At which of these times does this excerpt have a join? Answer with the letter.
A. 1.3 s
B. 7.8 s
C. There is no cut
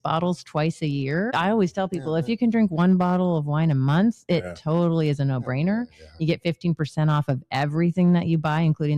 A